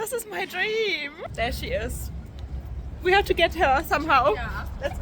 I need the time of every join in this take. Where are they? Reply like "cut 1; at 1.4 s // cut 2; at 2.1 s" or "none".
cut 1; at 1.2 s